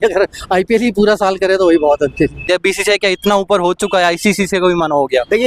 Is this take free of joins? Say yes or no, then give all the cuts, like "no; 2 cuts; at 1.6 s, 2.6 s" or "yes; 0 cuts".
no; 1 cut; at 2.4 s